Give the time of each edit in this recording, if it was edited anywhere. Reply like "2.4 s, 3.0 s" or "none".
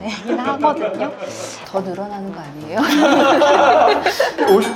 1.5 s